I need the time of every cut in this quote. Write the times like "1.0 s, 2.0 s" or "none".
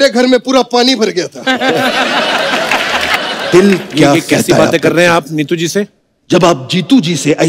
3.1 s